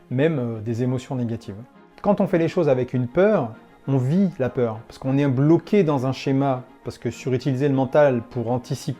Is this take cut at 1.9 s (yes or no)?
yes